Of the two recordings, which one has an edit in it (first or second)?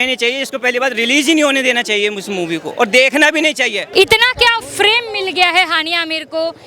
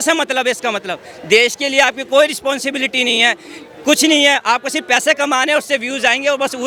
first